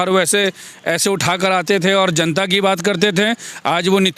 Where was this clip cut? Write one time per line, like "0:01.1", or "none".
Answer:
none